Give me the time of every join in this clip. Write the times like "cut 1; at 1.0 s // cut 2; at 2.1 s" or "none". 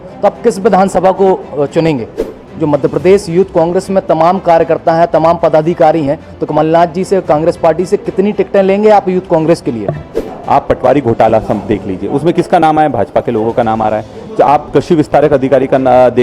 cut 1; at 2.2 s // cut 2; at 10.3 s

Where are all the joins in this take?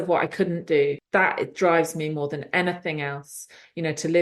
cut 1; at 1.0 s

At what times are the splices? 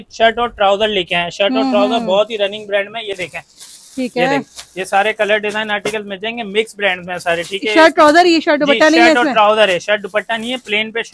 none

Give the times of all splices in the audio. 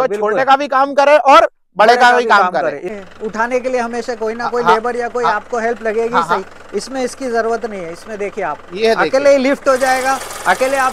cut 1; at 2.9 s

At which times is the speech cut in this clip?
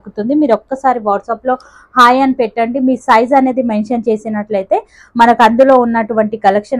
none

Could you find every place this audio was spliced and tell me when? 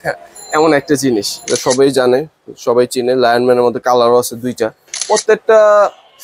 cut 1; at 1.3 s // cut 2; at 4.9 s

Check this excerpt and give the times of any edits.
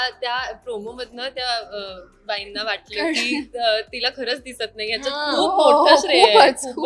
none

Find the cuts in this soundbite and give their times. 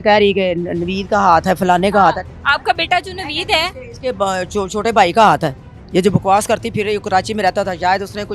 none

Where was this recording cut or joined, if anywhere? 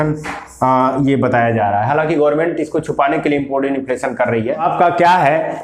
cut 1; at 4.6 s

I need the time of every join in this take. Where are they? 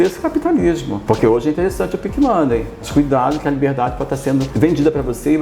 cut 1; at 0.9 s // cut 2; at 2.8 s // cut 3; at 4.5 s

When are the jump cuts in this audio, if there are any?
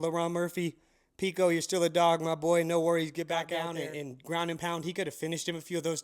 cut 1; at 3.6 s

